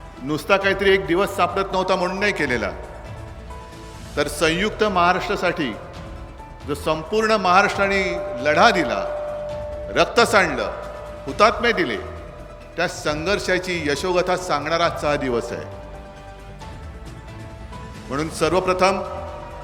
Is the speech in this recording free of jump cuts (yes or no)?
no